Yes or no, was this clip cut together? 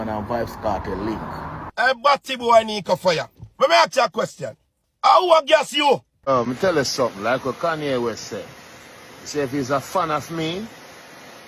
yes